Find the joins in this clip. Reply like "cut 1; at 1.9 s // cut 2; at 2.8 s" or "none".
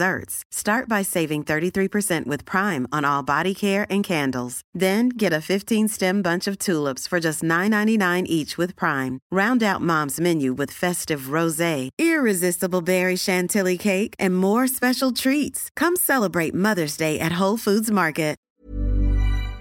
cut 1; at 18.5 s